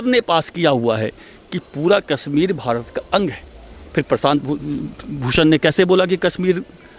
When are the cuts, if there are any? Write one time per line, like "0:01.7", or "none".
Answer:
none